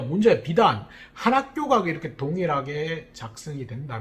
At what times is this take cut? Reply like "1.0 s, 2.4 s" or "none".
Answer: none